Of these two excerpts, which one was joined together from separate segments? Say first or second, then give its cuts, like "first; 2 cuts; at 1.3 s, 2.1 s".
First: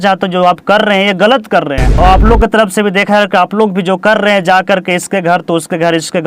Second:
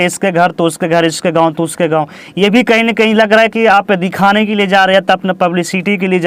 first; 1 cut; at 1.9 s